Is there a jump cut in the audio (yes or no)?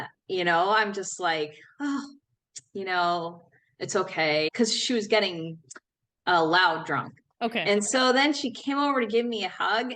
yes